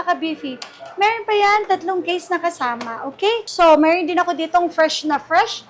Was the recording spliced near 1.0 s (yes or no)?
no